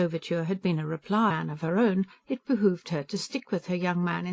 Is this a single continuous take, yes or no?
yes